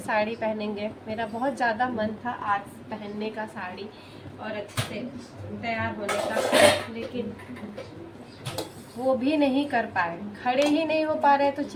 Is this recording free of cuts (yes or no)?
yes